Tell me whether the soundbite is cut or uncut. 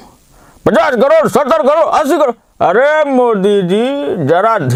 uncut